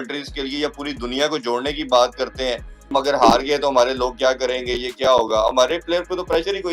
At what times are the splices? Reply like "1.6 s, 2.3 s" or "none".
2.9 s